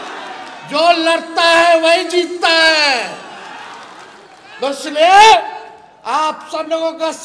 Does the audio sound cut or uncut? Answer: uncut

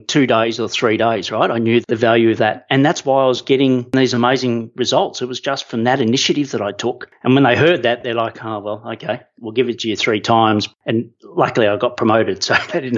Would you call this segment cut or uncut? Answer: uncut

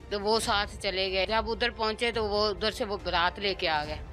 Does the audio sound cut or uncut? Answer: cut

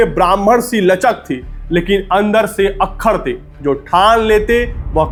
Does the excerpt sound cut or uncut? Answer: uncut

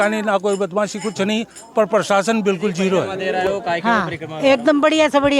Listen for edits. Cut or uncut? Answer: cut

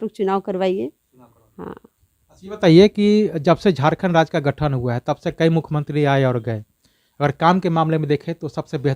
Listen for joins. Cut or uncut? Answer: uncut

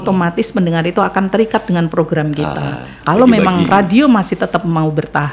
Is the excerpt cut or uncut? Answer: cut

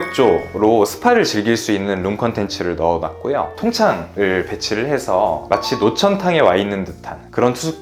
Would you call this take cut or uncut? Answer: uncut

